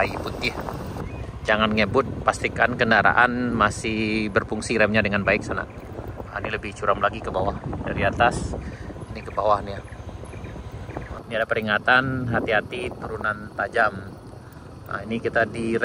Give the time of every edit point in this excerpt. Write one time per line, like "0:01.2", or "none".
0:01.0
0:11.2